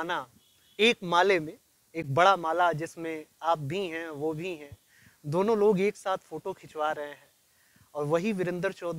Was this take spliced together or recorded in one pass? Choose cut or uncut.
uncut